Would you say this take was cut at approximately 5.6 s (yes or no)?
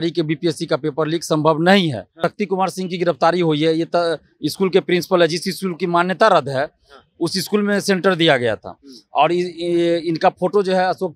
no